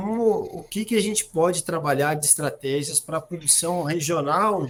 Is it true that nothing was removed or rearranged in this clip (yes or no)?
yes